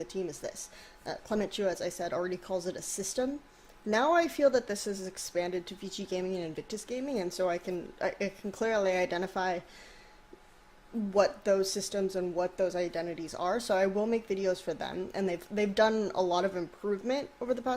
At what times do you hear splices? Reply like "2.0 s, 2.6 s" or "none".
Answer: 9.6 s